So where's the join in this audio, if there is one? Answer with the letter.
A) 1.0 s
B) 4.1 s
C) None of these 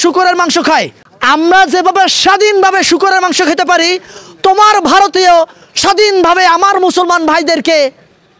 A